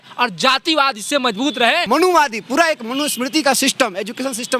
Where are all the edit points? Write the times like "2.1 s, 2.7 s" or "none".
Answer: 1.8 s